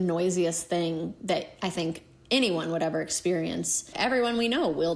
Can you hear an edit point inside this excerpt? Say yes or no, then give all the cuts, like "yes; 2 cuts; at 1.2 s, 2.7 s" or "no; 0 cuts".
yes; 1 cut; at 3.9 s